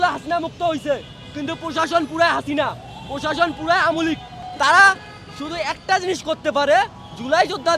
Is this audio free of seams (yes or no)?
no